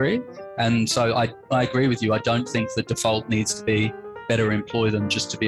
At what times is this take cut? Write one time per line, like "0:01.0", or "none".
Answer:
none